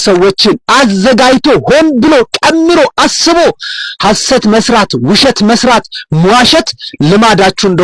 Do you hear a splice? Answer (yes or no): no